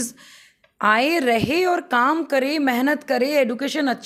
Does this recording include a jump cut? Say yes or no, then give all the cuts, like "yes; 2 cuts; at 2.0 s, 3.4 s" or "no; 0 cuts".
no; 0 cuts